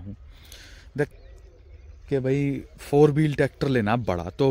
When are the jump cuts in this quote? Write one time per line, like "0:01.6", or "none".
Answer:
0:01.1